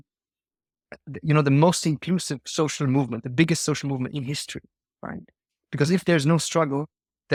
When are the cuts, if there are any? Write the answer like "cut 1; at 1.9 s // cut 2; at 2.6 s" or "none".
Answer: none